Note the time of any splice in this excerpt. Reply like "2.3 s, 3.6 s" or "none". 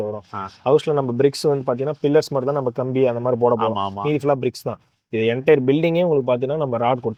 none